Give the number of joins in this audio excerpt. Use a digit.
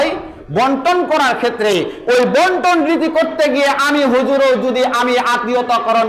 0